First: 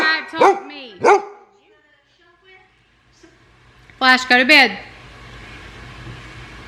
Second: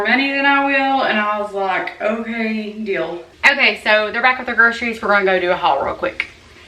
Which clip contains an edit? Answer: second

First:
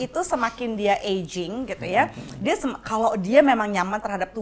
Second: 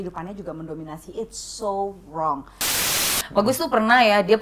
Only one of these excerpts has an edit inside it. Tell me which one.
second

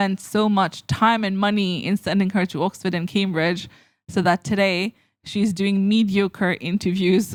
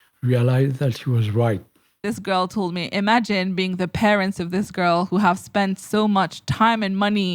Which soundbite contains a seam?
second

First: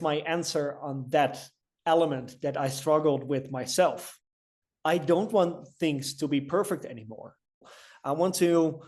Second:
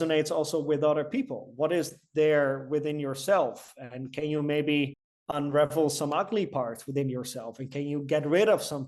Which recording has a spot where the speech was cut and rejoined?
first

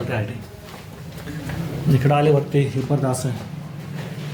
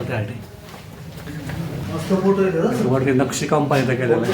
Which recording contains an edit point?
second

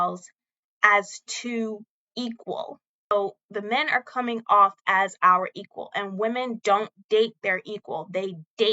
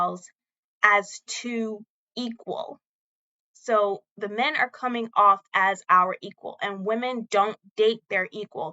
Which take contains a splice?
first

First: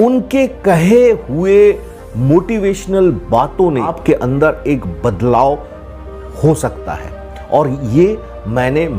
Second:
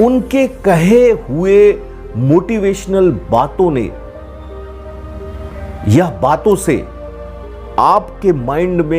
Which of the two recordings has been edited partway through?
first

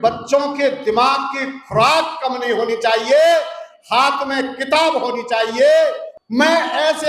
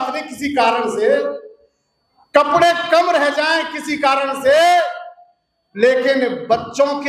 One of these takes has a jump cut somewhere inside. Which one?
first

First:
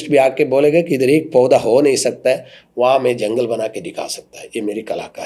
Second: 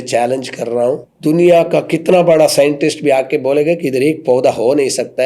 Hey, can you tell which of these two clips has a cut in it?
second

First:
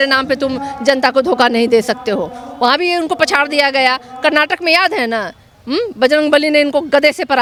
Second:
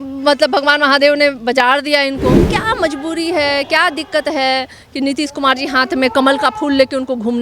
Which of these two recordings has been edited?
second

